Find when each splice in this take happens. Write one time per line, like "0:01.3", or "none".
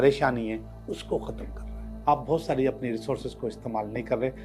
0:01.9